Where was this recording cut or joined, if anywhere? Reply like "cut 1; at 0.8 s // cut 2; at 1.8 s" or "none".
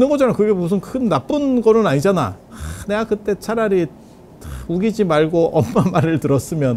none